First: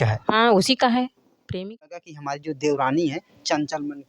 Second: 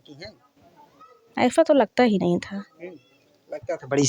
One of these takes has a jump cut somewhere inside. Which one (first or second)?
first